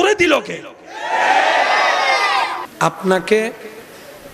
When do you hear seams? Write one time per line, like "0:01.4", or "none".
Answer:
0:02.6